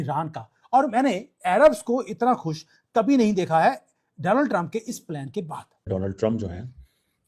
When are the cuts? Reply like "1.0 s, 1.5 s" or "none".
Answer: 5.9 s